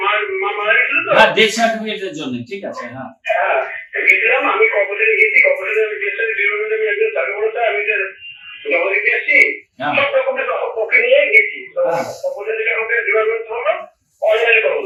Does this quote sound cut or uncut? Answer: uncut